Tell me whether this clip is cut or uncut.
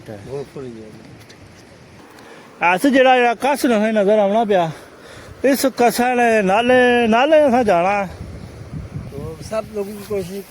cut